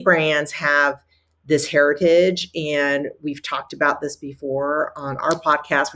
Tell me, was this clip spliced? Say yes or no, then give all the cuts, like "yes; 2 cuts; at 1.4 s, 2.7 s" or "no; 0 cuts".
no; 0 cuts